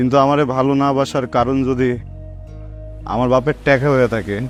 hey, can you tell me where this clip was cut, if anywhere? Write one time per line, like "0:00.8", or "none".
none